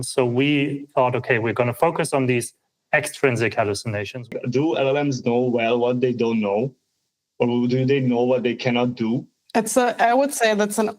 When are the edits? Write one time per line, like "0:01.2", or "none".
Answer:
0:04.3
0:09.4